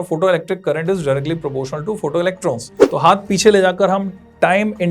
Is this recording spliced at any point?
yes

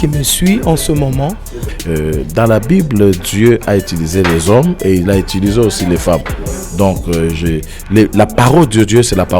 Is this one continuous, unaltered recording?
no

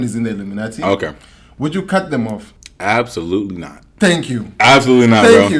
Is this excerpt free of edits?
yes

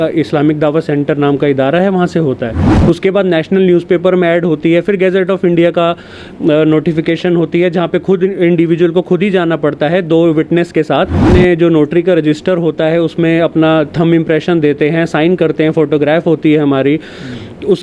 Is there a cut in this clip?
yes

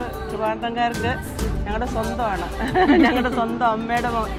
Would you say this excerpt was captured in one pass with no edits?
yes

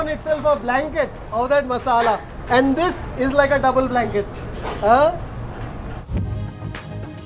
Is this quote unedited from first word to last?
yes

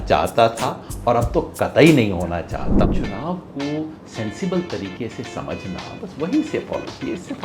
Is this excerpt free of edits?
no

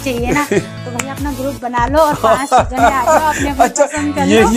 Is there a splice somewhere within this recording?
no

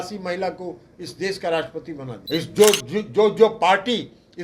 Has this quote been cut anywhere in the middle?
yes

